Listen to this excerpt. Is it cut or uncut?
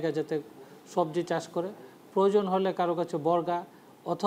uncut